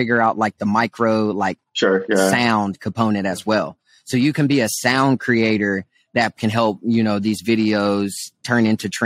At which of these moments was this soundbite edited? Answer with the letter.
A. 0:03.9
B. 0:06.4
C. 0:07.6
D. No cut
B